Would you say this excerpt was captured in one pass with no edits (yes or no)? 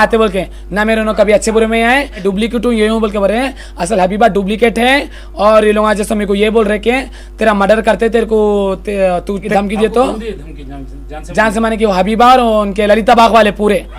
no